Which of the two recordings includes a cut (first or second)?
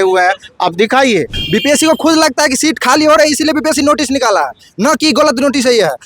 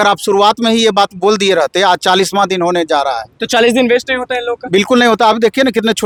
first